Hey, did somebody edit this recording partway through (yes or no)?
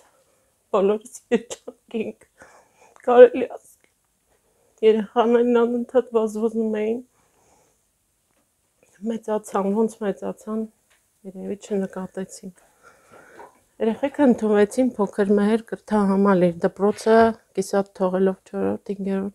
no